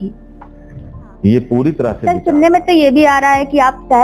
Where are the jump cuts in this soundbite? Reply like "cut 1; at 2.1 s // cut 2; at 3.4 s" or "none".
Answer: cut 1; at 2.0 s

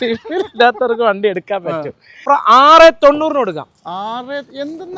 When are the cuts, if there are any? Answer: cut 1; at 2.2 s

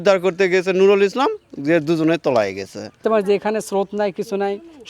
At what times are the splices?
cut 1; at 3.0 s

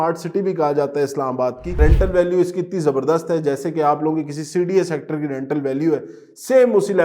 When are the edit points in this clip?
cut 1; at 1.8 s

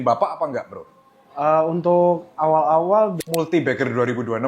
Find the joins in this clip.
cut 1; at 3.2 s

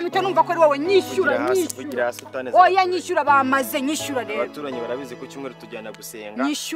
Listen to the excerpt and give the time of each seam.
none

